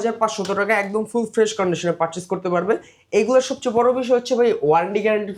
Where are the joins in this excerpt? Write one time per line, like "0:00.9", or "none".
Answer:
none